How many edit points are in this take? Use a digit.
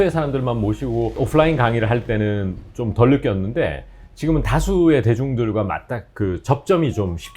1